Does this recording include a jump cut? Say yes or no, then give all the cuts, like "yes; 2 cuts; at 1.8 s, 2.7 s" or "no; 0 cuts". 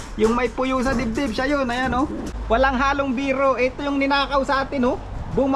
yes; 1 cut; at 2.3 s